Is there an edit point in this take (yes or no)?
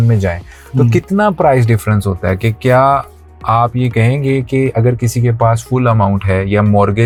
no